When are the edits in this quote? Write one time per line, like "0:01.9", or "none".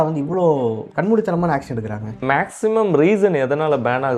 none